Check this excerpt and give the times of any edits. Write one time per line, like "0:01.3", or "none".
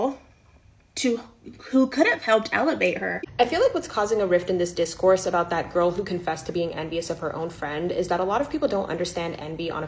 0:03.2